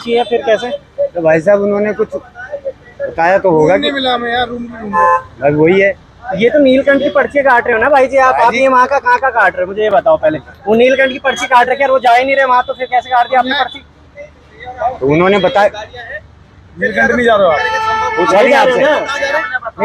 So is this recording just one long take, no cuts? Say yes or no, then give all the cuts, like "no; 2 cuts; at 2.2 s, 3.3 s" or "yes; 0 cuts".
yes; 0 cuts